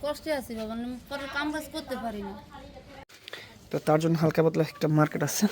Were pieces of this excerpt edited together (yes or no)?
yes